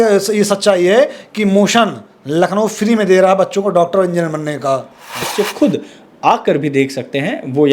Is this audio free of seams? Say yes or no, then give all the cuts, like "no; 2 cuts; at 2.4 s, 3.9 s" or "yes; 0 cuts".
no; 1 cut; at 5.2 s